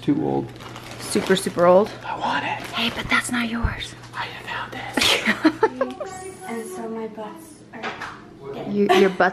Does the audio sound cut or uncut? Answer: cut